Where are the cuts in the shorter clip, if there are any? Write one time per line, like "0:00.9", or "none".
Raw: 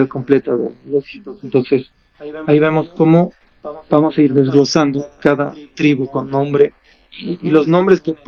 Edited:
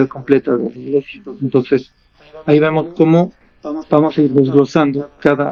none